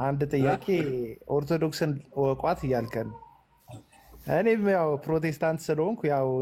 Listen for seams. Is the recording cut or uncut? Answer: uncut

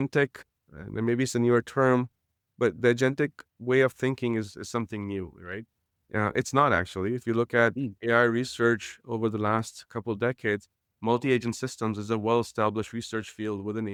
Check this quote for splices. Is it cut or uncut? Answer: uncut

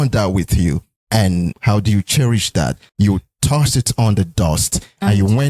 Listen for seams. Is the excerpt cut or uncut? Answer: cut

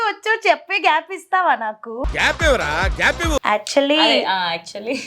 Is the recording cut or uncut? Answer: cut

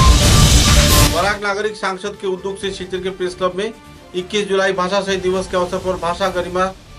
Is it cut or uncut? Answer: cut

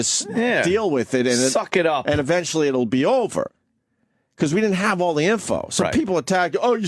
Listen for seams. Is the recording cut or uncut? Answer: cut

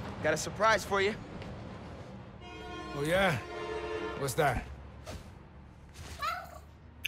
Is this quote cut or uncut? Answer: uncut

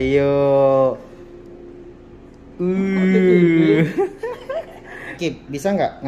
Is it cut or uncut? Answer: cut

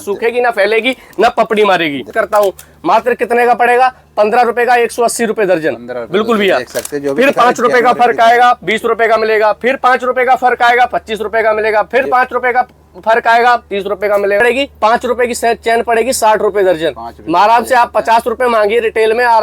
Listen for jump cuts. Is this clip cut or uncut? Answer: cut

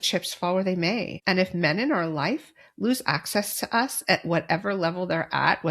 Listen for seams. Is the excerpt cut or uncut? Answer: cut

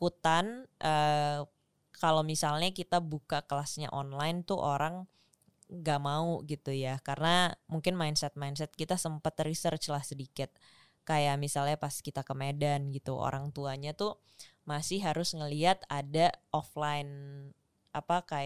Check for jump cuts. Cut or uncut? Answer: uncut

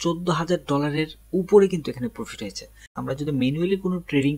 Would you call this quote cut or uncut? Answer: cut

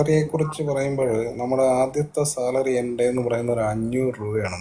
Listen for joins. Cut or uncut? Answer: uncut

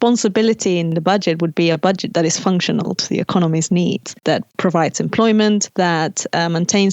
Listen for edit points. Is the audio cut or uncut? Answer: cut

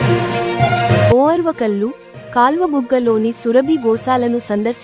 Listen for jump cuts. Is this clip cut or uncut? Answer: cut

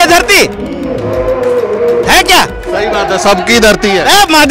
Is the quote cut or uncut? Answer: uncut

